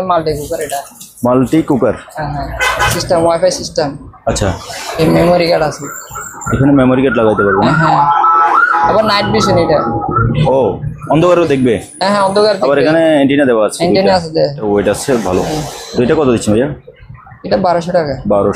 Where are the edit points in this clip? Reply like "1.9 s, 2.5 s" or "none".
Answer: 2.9 s, 14.7 s

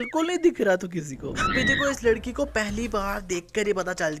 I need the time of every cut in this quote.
1.3 s

